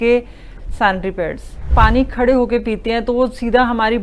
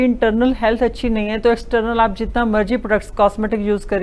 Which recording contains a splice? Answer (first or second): first